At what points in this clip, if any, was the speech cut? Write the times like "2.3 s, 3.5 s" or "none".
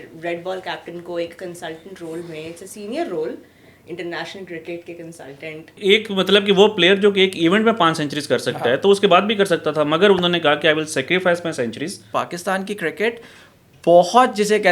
5.8 s, 12.0 s